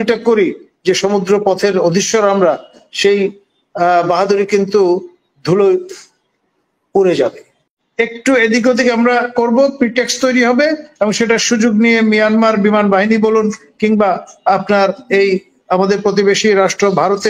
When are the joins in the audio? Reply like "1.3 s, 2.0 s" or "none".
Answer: 7.7 s